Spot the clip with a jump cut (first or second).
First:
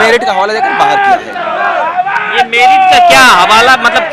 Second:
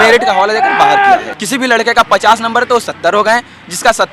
second